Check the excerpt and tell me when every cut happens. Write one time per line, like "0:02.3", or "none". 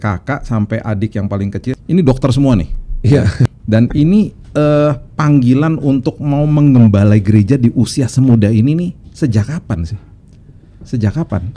0:01.7
0:03.5